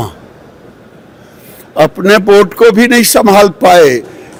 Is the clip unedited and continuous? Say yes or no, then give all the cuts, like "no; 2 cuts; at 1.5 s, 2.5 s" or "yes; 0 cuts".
yes; 0 cuts